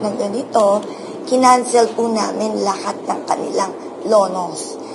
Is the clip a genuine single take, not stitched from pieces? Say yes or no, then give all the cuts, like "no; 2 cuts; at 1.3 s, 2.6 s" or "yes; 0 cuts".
yes; 0 cuts